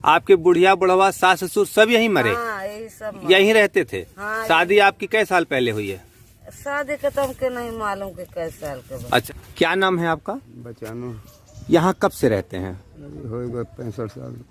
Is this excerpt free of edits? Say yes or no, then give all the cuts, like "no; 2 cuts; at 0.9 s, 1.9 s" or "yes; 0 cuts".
no; 1 cut; at 9.2 s